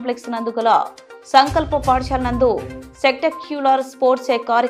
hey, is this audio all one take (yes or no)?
yes